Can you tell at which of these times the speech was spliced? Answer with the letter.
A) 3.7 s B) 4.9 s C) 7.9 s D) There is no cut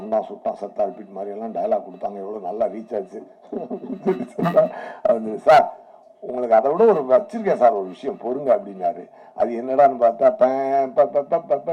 D